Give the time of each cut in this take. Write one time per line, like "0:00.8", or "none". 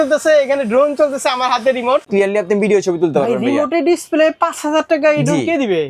0:02.1